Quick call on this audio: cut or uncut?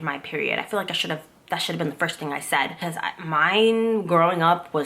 cut